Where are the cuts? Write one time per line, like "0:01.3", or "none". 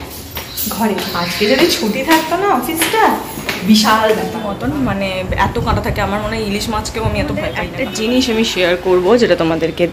0:04.4
0:07.7